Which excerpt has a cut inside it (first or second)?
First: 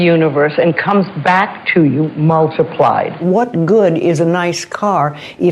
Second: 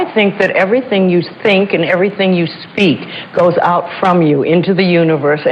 first